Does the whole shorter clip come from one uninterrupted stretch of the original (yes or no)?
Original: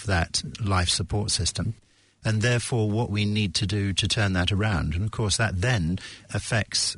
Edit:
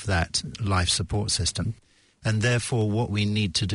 yes